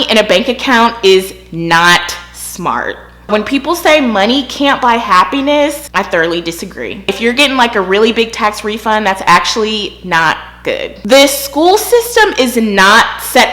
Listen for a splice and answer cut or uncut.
cut